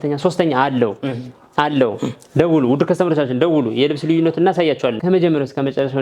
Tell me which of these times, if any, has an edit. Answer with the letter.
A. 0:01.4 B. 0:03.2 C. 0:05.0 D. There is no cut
C